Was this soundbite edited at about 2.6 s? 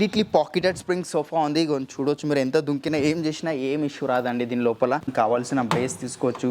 no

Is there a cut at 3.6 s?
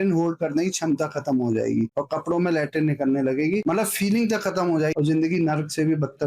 yes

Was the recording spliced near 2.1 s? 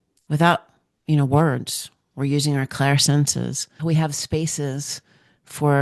no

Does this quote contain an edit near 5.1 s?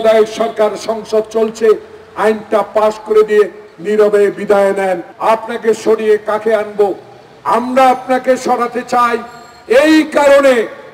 yes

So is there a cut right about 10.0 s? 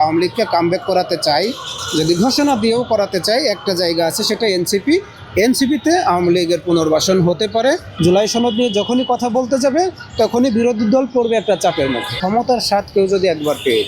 no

